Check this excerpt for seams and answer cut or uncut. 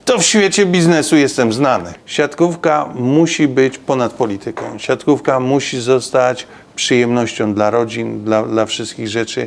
cut